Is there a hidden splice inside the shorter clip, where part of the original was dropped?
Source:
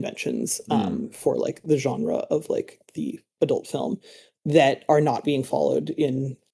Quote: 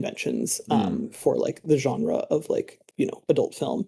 yes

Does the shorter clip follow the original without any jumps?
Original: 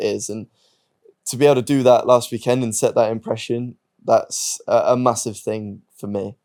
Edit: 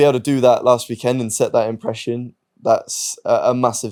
yes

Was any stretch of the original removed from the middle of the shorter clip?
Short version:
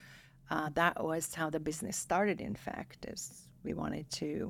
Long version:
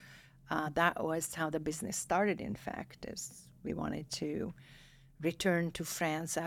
no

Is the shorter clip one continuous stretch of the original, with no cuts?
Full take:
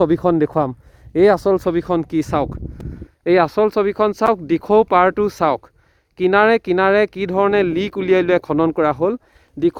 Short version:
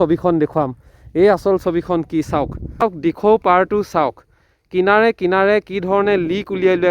no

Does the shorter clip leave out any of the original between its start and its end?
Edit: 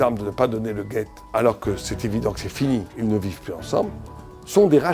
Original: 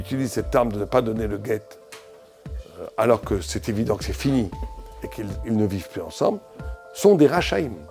yes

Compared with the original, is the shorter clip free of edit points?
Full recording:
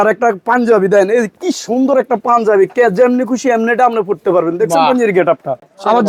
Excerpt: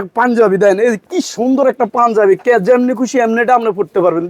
yes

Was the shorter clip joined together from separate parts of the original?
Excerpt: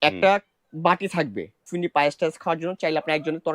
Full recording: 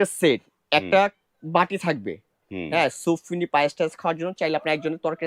yes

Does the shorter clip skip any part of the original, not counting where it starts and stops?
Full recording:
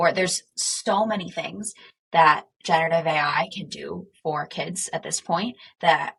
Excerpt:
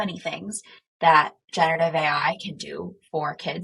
no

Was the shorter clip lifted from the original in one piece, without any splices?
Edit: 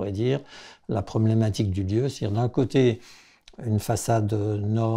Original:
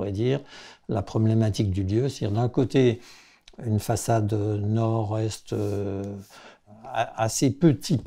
yes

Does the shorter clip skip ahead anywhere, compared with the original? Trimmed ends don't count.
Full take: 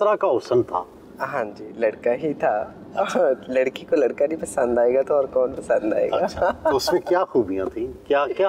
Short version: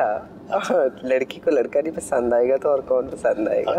no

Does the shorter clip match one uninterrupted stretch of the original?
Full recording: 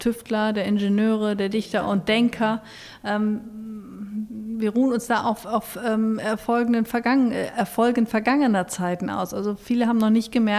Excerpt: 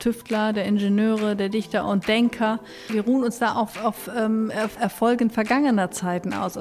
no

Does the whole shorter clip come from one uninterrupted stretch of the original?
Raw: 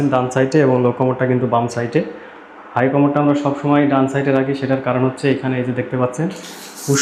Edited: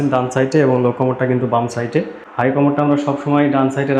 no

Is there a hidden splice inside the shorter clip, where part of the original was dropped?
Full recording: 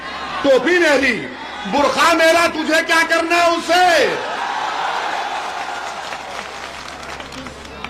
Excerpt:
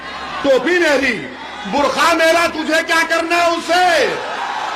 no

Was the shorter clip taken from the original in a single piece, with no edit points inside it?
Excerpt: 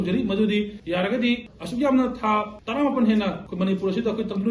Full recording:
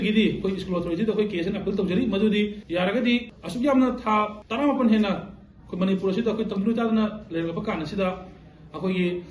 no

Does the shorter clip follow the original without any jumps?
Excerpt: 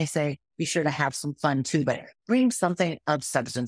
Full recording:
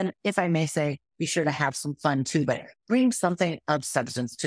yes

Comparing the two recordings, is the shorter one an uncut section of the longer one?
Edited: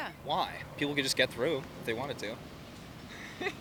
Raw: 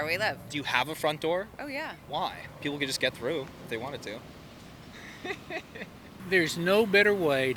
yes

